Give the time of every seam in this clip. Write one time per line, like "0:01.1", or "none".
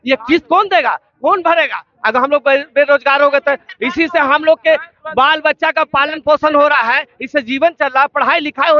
none

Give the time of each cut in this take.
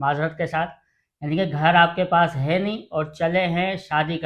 none

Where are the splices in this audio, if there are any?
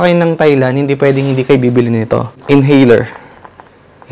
0:02.4

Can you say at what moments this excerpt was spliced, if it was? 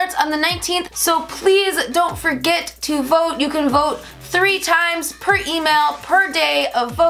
0:00.9

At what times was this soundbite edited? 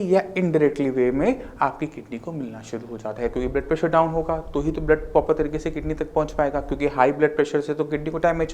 none

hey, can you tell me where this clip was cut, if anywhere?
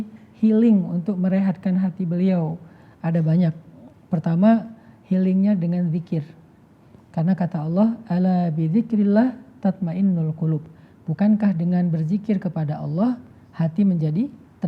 none

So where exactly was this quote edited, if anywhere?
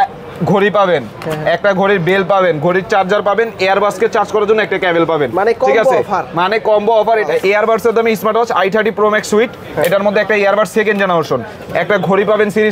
0:07.3

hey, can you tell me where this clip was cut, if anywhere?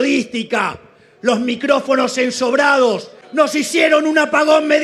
0:03.2

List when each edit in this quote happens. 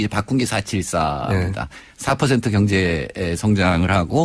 none

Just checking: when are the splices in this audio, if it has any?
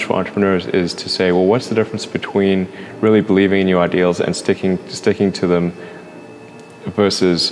none

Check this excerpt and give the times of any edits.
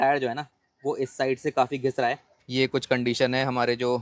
0:02.3

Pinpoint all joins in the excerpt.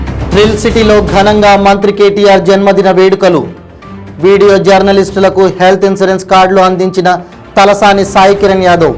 none

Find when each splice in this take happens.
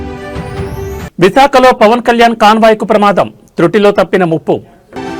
none

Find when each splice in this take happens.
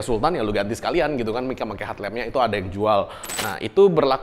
0:03.2

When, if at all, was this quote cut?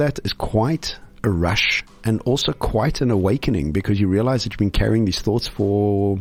none

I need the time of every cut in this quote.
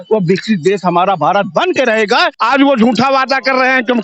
0:02.3

